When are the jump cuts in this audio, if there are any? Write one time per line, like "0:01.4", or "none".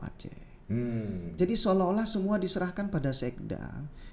none